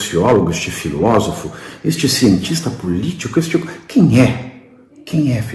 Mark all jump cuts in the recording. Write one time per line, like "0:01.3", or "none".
none